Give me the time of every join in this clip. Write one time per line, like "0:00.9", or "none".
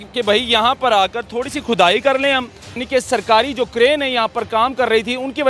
0:02.8

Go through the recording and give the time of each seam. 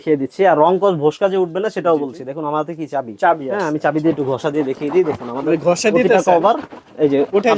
none

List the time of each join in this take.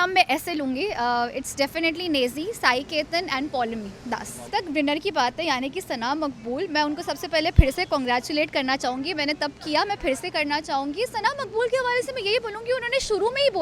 0:04.5

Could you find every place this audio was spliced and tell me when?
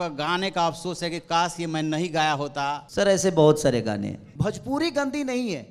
0:02.8
0:04.2

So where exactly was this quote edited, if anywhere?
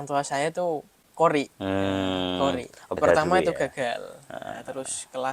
0:01.0
0:02.9

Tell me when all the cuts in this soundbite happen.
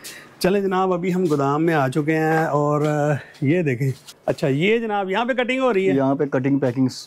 0:04.1

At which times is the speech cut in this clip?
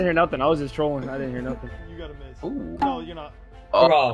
0:01.7

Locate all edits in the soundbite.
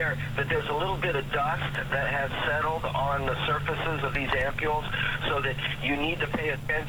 none

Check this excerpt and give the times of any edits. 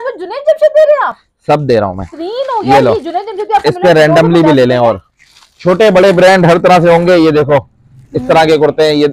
none

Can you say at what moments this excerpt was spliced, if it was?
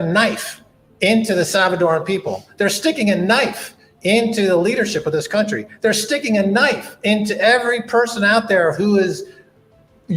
none

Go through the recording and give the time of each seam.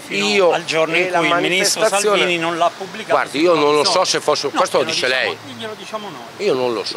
none

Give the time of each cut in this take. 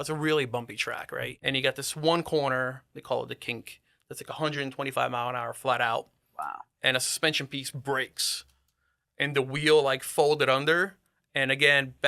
0:01.3

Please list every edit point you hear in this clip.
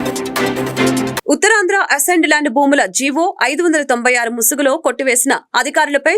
0:01.1

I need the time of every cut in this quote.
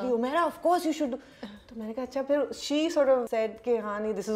0:03.3

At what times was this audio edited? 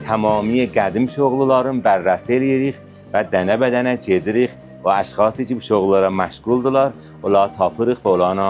none

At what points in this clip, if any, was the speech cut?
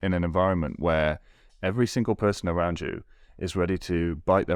none

